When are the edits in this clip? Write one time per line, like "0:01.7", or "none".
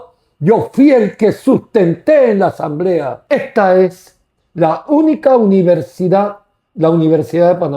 0:03.1

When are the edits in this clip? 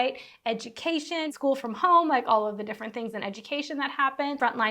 0:01.3

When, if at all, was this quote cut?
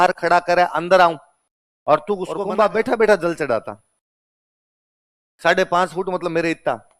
0:02.4

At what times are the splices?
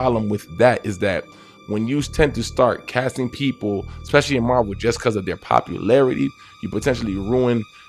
none

